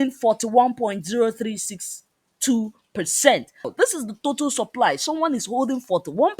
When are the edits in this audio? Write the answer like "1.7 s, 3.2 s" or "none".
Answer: 3.7 s

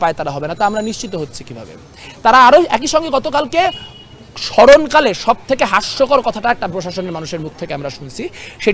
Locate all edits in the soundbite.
none

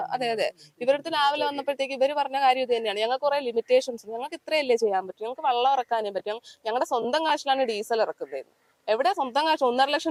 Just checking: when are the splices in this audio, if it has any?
none

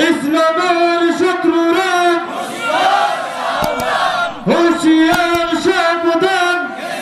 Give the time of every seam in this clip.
none

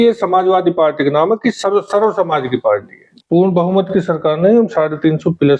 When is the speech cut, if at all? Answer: 3.0 s

